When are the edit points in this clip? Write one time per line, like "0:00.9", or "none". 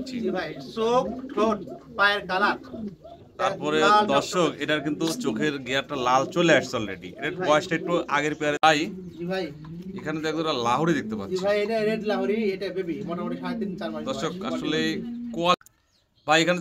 0:08.6
0:15.5